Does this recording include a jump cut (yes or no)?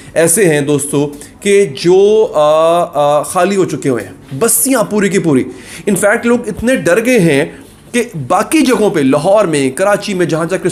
no